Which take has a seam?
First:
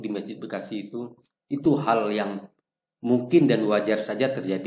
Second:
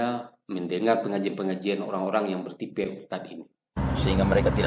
second; 1 cut; at 3.8 s

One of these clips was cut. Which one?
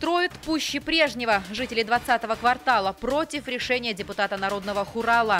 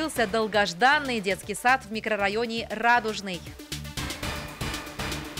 second; 1 cut; at 3.5 s

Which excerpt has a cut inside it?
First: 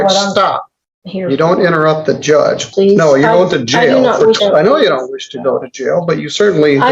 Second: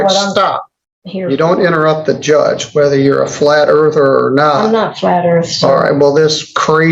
first; 2 cuts; at 2.7 s, 4.4 s

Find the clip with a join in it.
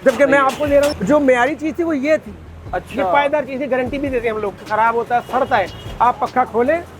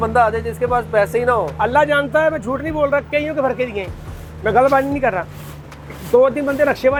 first; 2 cuts; at 0.9 s, 4.6 s

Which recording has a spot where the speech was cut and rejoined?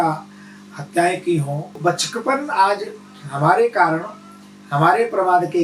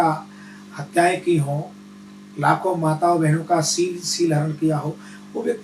first; 1 cut; at 1.8 s

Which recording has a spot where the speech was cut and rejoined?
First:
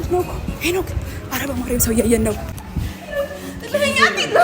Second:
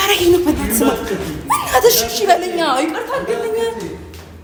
first; 1 cut; at 2.5 s

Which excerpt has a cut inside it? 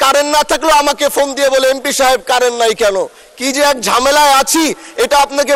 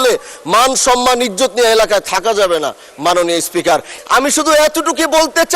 second; 1 cut; at 3.9 s

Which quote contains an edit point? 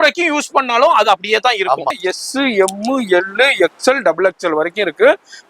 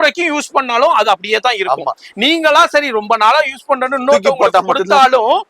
first; 1 cut; at 2.0 s

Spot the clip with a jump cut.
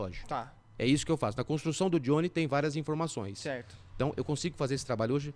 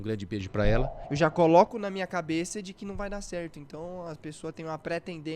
second; 1 cut; at 1.0 s

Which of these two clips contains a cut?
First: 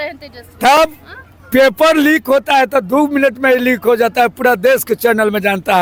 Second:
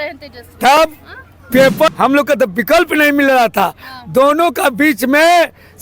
second; 1 cut; at 1.9 s

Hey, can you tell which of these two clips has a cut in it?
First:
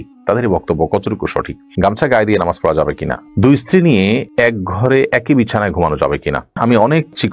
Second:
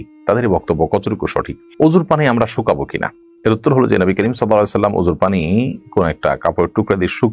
first; 3 cuts; at 1.7 s, 3.2 s, 6.5 s

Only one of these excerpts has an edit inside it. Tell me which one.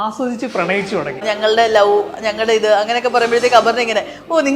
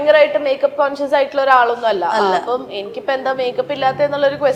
first; 1 cut; at 1.2 s

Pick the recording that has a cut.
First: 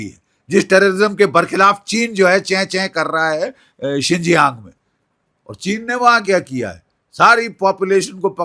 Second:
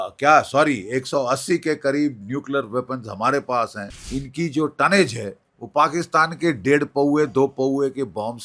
second; 1 cut; at 4.0 s

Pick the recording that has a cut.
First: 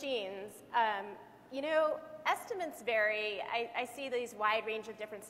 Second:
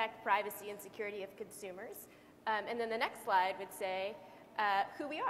first; 1 cut; at 2.4 s

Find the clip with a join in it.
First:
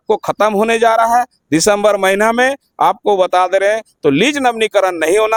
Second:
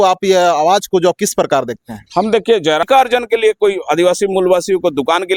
second; 1 cut; at 2.9 s

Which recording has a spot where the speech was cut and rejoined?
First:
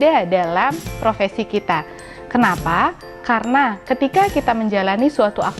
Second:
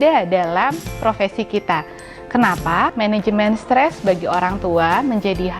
second; 1 cut; at 2.9 s

